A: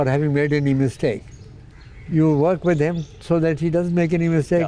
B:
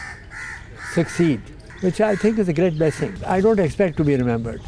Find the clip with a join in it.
B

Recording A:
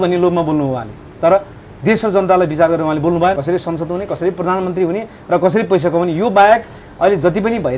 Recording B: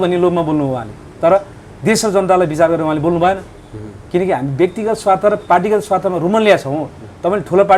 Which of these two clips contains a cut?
A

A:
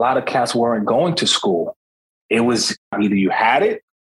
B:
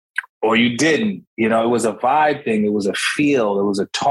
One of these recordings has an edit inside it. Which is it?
A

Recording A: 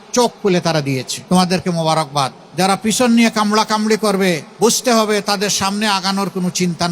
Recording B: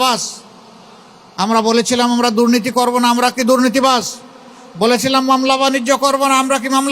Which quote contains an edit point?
A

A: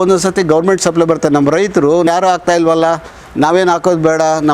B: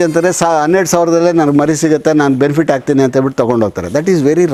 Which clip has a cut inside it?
A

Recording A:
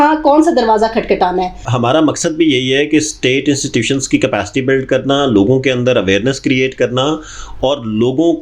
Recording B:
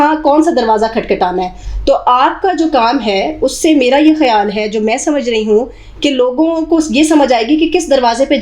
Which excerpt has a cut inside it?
A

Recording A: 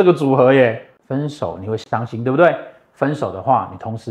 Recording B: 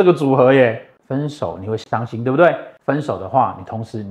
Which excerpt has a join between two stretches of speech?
B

